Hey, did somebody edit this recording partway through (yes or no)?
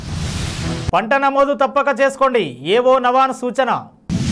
no